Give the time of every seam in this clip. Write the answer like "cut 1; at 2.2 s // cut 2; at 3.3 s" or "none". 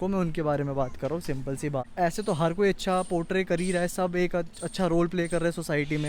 cut 1; at 1.9 s

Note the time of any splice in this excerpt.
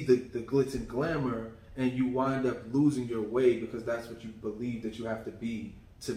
none

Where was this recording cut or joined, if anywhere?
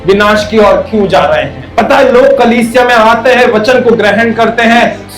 cut 1; at 1.6 s

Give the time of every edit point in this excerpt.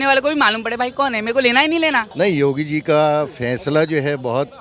cut 1; at 2.1 s

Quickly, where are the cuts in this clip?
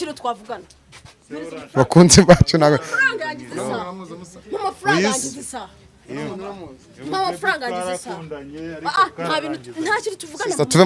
none

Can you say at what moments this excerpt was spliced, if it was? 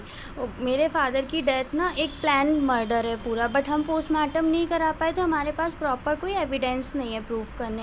none

